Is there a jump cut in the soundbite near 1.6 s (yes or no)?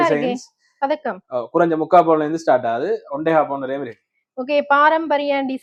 no